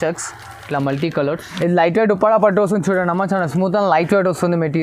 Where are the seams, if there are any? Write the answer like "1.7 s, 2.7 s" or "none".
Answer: 1.5 s